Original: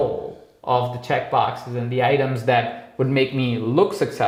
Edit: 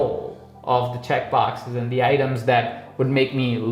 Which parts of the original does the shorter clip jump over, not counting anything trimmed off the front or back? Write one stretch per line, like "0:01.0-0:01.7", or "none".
none